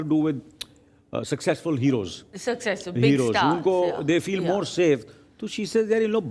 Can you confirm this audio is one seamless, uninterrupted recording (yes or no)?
yes